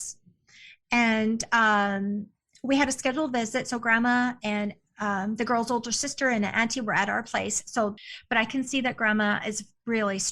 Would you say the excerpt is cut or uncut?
cut